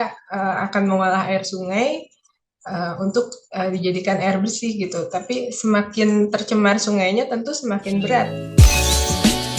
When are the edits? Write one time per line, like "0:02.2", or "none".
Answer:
0:08.4